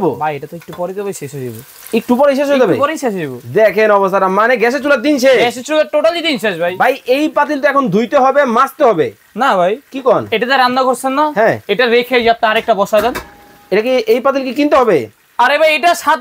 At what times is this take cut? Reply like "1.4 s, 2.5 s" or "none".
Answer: 6.7 s